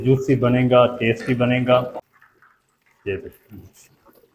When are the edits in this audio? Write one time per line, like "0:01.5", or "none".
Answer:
0:02.0

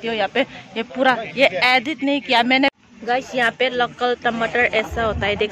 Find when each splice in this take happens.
0:02.8

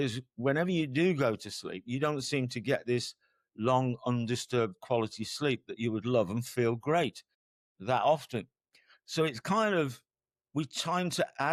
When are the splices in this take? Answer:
none

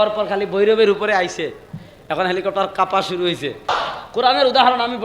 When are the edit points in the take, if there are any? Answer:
0:03.7

